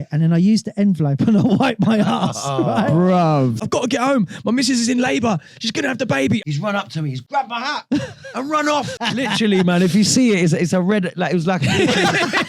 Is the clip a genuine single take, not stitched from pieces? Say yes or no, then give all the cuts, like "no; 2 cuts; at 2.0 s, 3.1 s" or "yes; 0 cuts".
no; 3 cuts; at 3.6 s, 6.4 s, 8.9 s